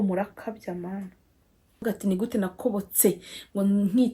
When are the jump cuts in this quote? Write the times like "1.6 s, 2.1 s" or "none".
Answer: 1.7 s